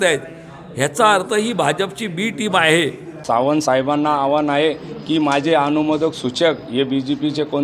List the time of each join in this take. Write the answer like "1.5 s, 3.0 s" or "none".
3.1 s